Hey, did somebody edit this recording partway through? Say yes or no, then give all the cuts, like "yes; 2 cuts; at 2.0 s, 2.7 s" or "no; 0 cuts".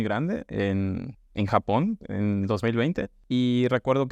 no; 0 cuts